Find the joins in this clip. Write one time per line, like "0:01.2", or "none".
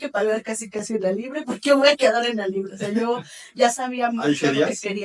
none